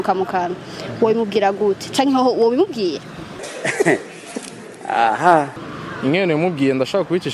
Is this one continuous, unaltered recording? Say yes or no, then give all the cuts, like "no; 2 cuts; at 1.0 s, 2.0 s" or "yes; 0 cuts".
no; 2 cuts; at 3.4 s, 5.6 s